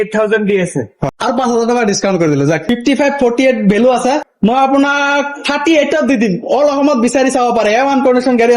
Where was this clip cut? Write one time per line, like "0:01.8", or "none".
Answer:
0:01.0
0:02.6
0:04.3